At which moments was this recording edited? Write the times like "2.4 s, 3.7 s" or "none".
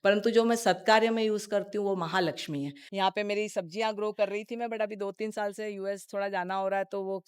2.8 s